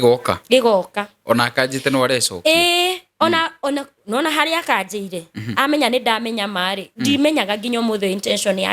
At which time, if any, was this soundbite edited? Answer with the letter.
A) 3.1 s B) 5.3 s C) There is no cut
C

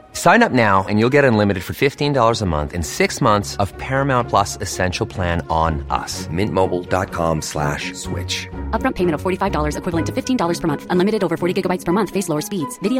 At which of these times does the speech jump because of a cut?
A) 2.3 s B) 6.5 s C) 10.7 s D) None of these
D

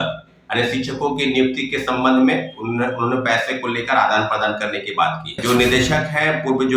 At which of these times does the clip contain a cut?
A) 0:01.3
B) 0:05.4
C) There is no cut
B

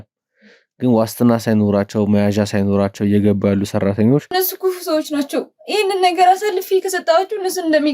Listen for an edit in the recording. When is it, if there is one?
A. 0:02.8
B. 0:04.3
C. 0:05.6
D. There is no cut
B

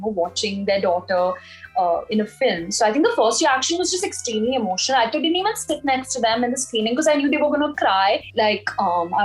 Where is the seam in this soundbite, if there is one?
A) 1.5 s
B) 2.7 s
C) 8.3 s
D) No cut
C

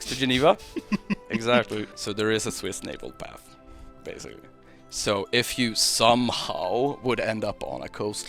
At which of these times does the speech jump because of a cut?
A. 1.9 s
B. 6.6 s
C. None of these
A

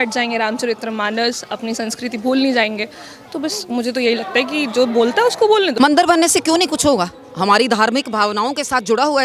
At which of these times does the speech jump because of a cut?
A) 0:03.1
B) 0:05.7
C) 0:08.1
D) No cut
B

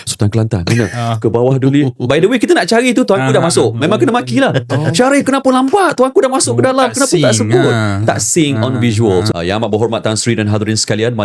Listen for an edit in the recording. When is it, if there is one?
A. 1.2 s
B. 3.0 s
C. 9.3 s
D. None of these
C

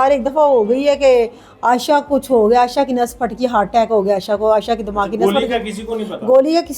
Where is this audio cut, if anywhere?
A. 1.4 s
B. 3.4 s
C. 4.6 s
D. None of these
D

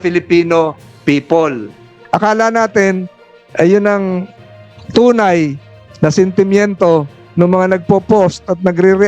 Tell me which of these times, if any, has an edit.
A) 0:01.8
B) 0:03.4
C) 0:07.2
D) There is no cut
A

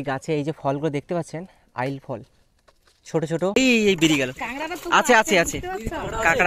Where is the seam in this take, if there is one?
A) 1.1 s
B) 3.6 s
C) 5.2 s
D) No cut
B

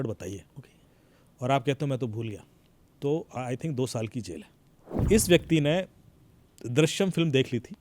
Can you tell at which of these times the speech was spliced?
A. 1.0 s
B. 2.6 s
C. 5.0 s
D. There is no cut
C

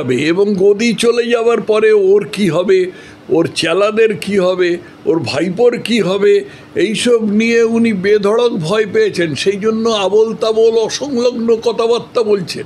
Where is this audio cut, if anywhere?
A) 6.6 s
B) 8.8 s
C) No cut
C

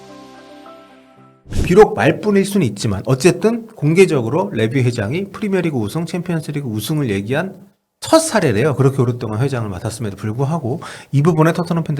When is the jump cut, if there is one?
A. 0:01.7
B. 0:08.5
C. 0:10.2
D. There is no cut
A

